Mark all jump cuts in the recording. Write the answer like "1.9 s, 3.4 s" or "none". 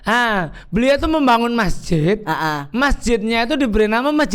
none